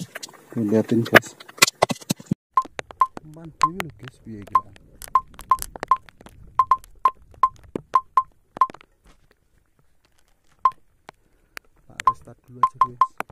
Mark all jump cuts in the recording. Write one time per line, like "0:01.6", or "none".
0:02.4

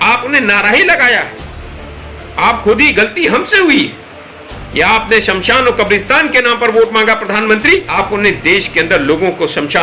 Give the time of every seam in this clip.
0:07.9

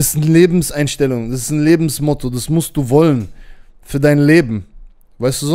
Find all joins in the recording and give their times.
none

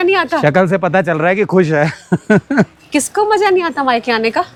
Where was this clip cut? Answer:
none

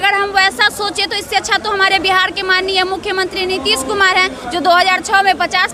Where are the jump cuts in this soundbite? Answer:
none

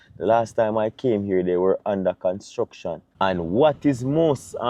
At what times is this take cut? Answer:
0:03.0

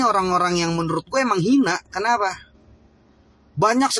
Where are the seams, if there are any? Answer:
none

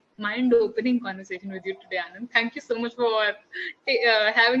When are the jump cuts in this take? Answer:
none

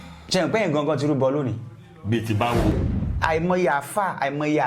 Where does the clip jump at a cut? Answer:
0:02.7

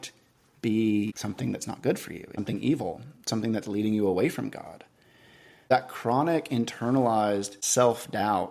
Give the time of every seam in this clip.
0:01.2
0:02.4
0:05.7
0:07.6

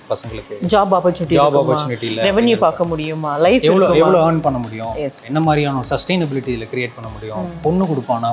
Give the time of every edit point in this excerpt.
0:05.2

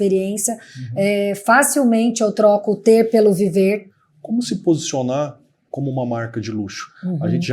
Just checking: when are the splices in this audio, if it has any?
0:03.9

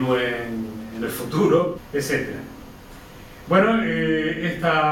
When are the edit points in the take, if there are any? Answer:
none

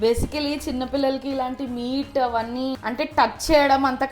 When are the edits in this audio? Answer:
0:02.8

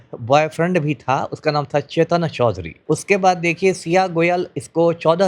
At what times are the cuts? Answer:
0:02.7

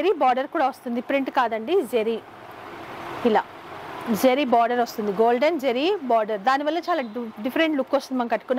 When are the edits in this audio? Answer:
none

